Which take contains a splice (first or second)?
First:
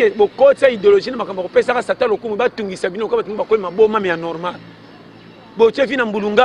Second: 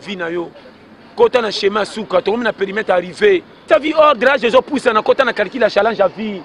second